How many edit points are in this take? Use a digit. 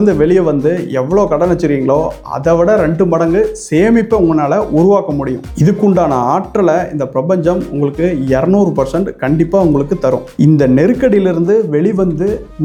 0